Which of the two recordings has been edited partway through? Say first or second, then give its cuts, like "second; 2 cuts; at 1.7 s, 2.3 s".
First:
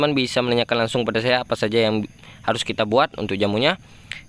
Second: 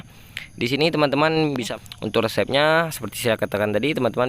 second; 1 cut; at 1.7 s